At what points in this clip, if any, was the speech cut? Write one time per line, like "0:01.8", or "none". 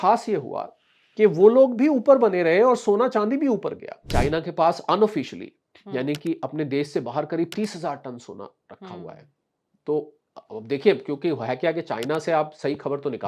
0:04.1